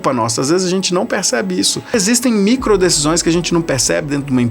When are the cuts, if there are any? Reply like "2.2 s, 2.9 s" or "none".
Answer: 1.9 s